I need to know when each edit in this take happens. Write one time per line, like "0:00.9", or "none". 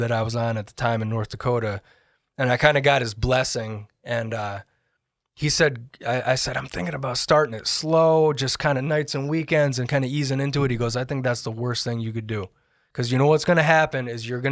none